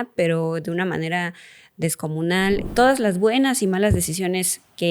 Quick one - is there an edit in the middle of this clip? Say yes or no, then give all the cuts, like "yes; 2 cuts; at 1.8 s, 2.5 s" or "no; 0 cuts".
yes; 1 cut; at 2.6 s